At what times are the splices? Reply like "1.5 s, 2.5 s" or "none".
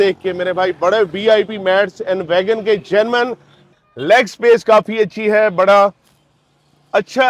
3.6 s